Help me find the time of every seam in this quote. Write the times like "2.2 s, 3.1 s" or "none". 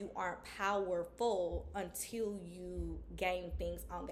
none